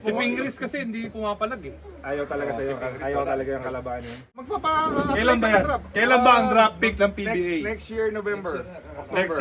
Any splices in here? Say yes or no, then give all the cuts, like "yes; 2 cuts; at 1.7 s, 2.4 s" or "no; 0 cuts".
yes; 1 cut; at 4.4 s